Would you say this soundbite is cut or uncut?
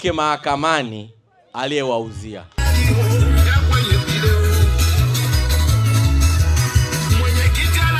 uncut